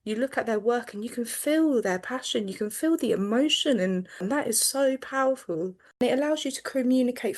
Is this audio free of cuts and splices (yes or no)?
no